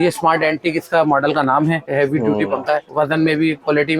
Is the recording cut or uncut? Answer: cut